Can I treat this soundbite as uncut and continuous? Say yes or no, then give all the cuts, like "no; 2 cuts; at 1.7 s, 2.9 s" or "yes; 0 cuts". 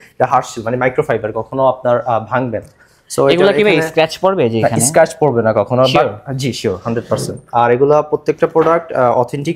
yes; 0 cuts